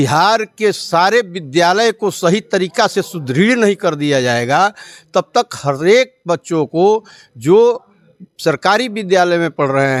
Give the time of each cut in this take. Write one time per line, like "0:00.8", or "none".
none